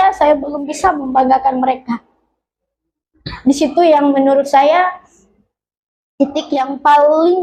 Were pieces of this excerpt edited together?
no; 0 cuts

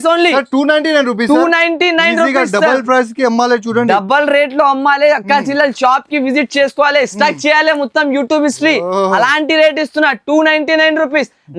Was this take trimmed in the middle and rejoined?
no; 0 cuts

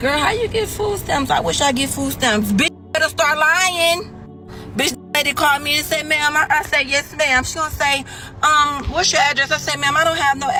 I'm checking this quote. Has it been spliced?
no; 0 cuts

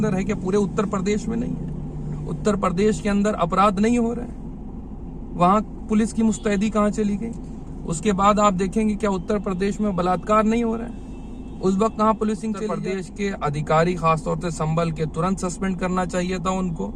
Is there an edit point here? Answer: yes; 1 cut; at 12.8 s

